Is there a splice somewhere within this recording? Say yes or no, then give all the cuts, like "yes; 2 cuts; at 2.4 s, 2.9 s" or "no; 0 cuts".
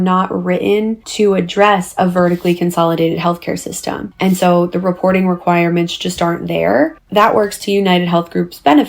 yes; 2 cuts; at 1.0 s, 4.0 s